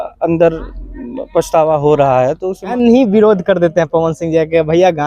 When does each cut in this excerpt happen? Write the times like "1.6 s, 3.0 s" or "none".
2.7 s